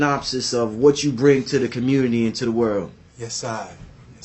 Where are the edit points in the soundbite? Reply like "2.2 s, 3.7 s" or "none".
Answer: none

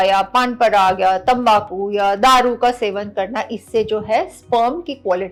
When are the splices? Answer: none

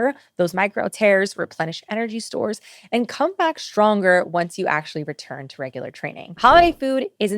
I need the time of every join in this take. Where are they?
6.3 s

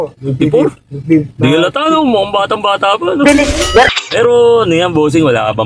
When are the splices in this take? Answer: 4.1 s

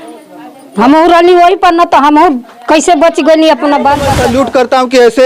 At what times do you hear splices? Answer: 4.1 s

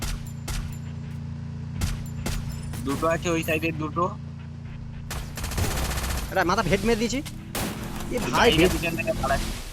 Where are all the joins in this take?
none

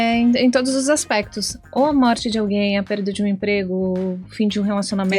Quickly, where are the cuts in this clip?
none

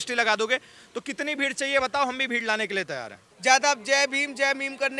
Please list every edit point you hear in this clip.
3.2 s

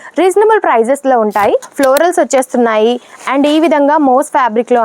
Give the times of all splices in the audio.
1.6 s

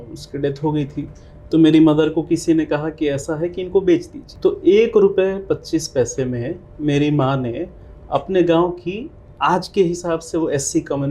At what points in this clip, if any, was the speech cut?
4.2 s

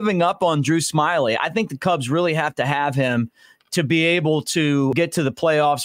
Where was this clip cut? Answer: 4.9 s

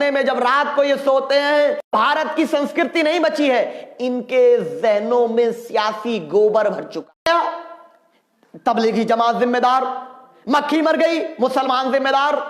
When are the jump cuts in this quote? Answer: 7.3 s

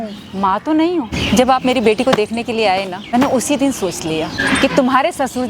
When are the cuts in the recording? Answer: 1.2 s, 3.0 s, 4.4 s

